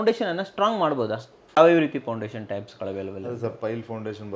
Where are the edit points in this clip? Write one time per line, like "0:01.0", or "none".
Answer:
0:01.6